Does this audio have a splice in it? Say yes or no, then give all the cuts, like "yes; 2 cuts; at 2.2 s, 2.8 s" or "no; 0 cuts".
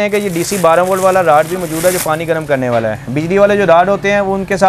no; 0 cuts